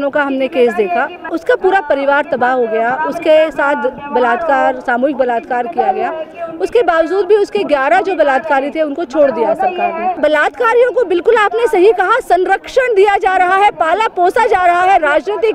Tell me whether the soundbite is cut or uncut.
cut